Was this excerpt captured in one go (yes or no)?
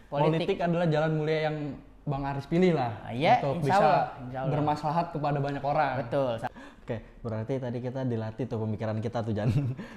no